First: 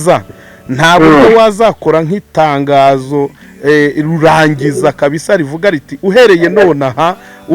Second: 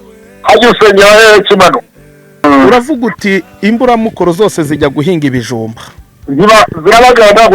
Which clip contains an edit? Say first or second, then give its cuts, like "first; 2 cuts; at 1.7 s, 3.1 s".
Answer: second; 1 cut; at 2.4 s